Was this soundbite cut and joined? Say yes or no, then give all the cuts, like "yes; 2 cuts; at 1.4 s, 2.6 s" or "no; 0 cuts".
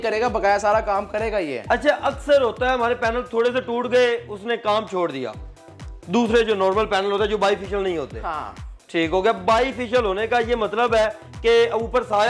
no; 0 cuts